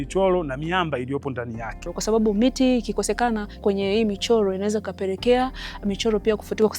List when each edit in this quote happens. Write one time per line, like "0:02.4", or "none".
0:01.9
0:03.6